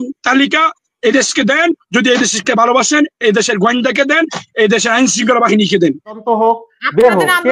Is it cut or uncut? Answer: cut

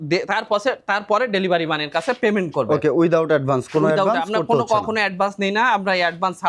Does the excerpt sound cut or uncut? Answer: uncut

